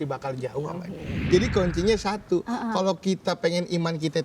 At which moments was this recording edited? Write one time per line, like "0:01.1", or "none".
0:01.3